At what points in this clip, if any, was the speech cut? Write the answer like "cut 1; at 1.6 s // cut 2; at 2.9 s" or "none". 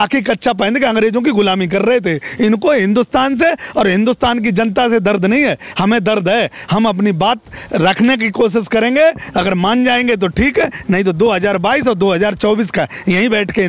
none